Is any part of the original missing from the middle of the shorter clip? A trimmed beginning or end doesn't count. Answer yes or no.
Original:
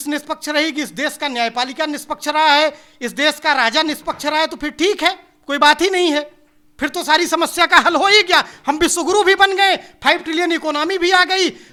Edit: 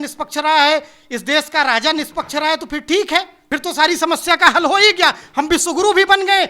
yes